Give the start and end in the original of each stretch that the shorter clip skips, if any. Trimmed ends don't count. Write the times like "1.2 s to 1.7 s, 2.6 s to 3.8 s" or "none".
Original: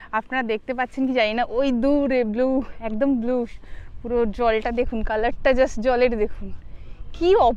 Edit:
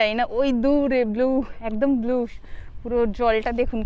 none